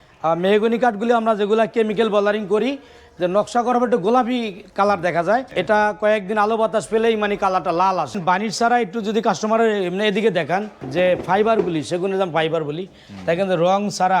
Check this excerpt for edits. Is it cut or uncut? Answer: cut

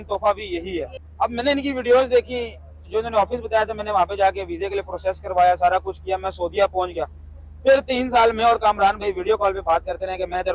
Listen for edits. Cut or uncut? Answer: cut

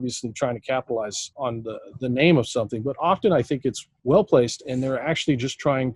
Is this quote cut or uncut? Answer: cut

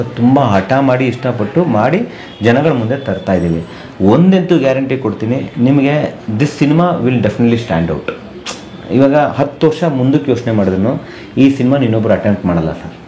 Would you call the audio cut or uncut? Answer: uncut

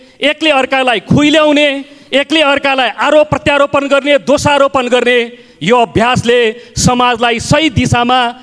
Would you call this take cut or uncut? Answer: uncut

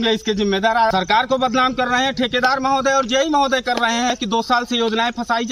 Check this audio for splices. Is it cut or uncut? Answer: cut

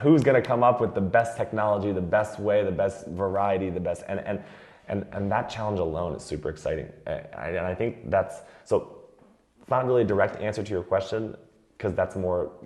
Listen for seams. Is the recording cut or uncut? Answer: uncut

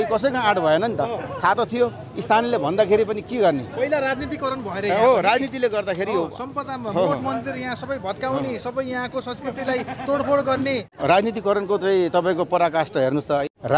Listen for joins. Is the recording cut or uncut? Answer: uncut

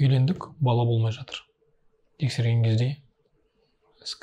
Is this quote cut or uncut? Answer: uncut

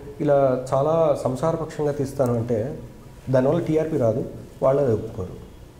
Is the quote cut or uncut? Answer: uncut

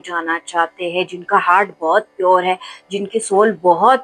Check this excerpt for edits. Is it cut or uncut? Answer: uncut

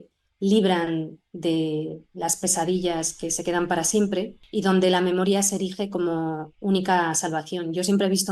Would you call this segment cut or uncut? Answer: cut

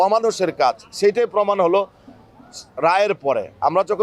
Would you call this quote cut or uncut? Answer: uncut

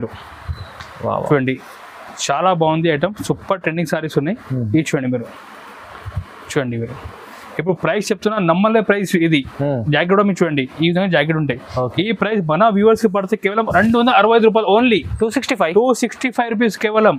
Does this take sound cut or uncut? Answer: uncut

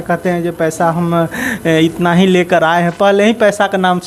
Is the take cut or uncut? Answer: uncut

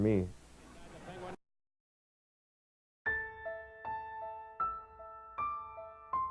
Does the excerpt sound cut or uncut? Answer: uncut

